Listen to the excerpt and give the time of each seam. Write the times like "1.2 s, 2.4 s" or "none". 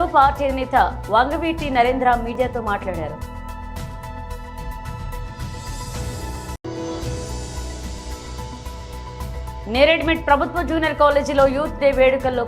3.2 s, 4.6 s, 6.3 s, 8.1 s